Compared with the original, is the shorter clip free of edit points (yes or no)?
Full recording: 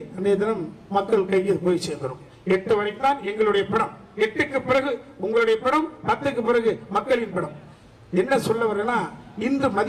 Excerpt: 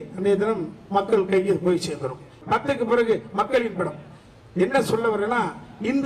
no